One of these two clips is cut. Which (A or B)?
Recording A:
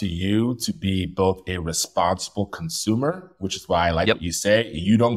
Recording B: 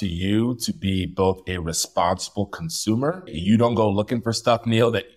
B